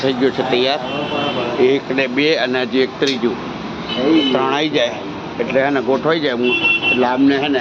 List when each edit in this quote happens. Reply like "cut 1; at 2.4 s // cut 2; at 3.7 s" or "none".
none